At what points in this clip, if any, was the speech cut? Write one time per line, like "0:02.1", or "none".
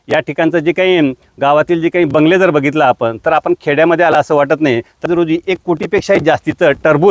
0:05.1